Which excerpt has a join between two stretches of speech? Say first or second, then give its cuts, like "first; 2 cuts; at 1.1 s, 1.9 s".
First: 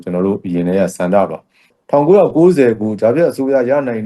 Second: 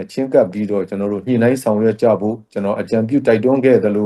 first; 1 cut; at 1.7 s